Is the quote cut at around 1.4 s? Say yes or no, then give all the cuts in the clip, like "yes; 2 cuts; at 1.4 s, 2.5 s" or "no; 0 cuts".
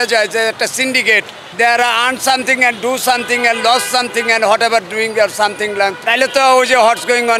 yes; 2 cuts; at 1.4 s, 6.0 s